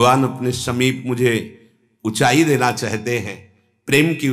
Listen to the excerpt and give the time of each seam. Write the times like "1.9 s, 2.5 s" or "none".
none